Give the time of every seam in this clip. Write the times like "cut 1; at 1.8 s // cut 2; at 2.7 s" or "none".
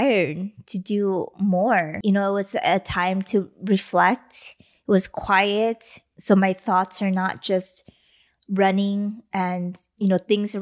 cut 1; at 1.9 s